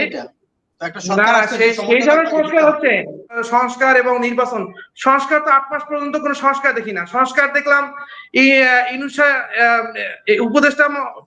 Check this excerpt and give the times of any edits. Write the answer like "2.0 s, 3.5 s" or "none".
3.4 s